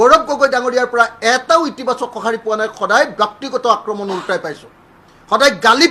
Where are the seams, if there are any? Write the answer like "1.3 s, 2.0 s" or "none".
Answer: none